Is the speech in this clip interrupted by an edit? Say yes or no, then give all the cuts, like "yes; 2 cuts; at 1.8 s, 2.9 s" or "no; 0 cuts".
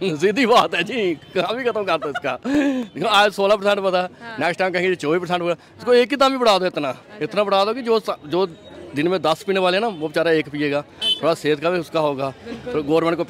no; 0 cuts